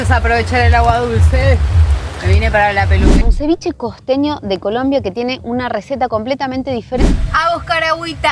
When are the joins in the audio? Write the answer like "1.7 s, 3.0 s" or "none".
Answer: 3.3 s, 7.0 s